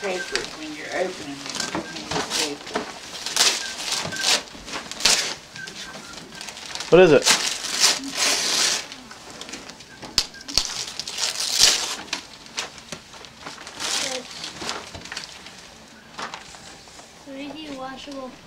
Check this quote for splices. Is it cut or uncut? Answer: uncut